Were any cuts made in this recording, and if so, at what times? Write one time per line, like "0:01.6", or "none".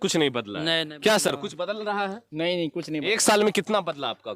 none